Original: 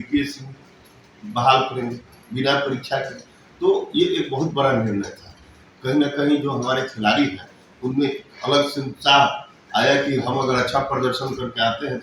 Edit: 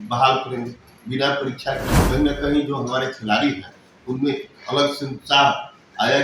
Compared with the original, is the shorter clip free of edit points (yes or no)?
no